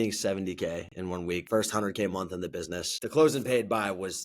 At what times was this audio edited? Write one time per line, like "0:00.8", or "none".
0:01.4
0:03.0